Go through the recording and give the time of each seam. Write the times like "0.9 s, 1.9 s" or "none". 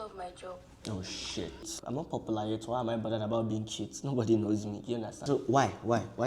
1.8 s, 5.2 s